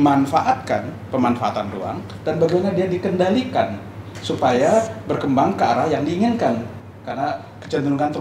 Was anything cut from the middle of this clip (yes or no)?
no